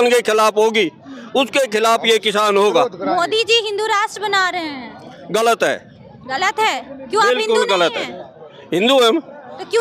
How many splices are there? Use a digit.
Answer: 0